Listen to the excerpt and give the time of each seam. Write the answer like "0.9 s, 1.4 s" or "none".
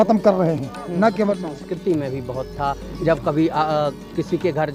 1.5 s

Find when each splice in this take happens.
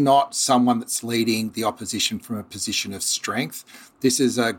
none

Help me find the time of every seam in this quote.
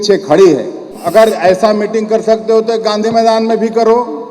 0.9 s

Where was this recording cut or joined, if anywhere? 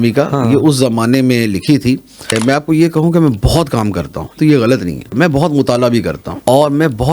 2.3 s, 4.3 s, 5.1 s, 6.2 s

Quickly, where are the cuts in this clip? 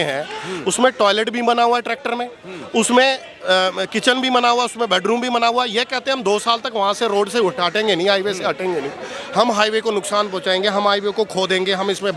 none

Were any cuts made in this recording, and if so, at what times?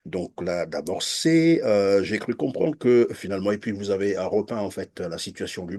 none

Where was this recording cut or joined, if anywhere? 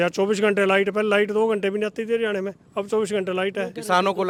none

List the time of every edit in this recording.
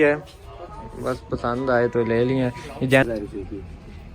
3.0 s

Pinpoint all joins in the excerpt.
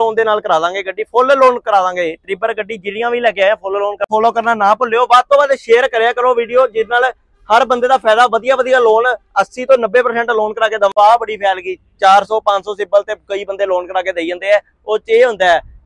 4.0 s, 10.9 s

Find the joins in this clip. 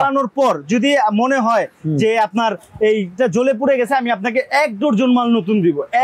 none

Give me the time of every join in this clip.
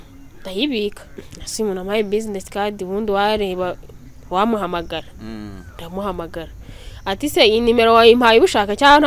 1.3 s

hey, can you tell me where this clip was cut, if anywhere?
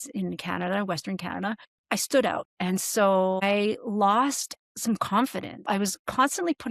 1.8 s, 2.5 s, 5.5 s

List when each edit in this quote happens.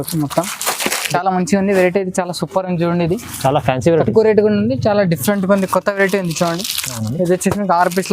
1.0 s

